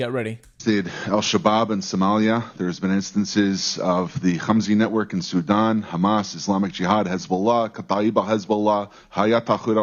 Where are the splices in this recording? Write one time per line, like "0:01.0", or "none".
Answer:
none

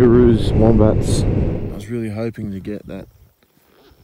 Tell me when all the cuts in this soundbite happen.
0:01.2

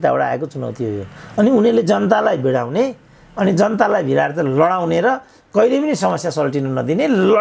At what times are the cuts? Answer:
none

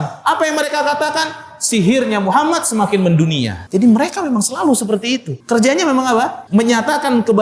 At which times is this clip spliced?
0:03.6
0:05.3
0:06.4

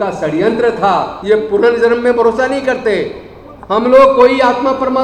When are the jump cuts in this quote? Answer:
0:01.1

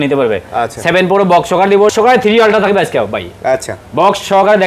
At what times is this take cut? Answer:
0:01.9

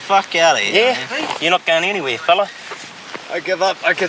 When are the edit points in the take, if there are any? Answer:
0:02.4

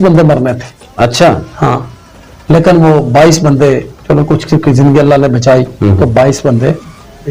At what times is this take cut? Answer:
none

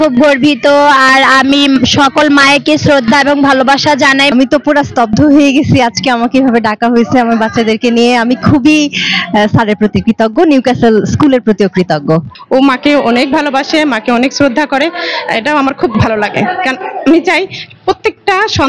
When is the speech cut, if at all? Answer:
0:04.3
0:12.3

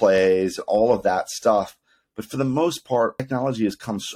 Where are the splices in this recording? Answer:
0:03.2

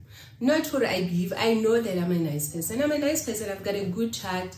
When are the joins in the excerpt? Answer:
none

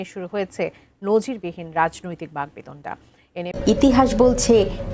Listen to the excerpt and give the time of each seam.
0:03.5

